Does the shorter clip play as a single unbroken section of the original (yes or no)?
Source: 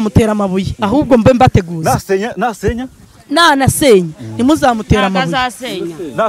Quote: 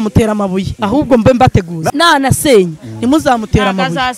no